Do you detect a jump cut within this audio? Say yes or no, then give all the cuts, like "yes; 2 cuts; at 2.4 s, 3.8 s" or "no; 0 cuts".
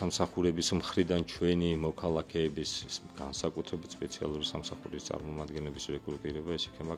no; 0 cuts